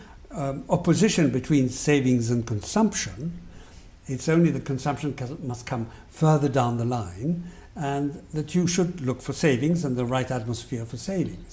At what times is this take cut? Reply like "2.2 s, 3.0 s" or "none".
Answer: none